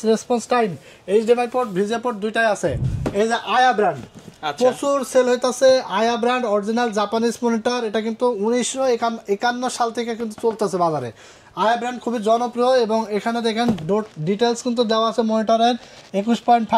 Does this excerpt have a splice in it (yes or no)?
yes